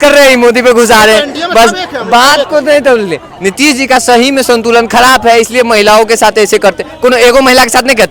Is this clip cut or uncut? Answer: uncut